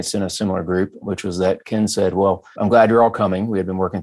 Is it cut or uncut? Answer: cut